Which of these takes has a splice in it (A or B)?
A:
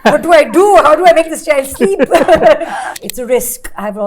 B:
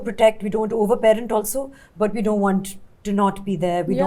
A